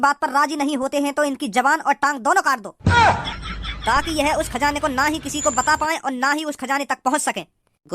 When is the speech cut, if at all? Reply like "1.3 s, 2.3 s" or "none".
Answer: 2.7 s

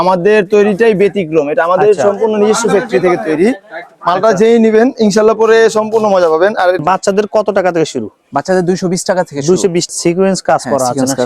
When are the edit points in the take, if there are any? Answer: 6.8 s, 9.9 s

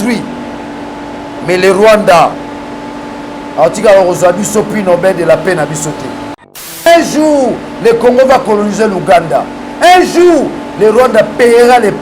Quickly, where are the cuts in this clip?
6.9 s

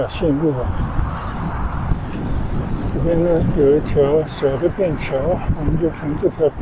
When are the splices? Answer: 1.9 s

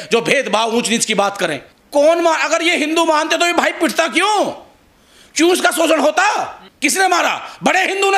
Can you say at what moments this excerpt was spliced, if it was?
1.7 s, 6.6 s

